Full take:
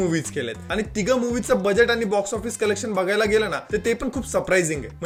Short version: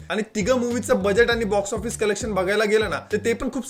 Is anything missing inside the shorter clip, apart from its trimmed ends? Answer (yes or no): no